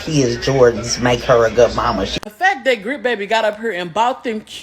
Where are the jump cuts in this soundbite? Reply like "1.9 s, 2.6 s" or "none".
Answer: 2.2 s